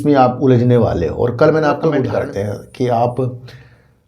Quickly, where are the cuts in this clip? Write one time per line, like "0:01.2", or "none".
0:02.0